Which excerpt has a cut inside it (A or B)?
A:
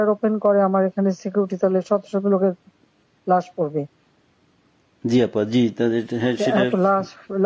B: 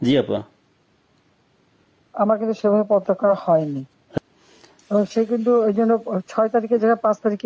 B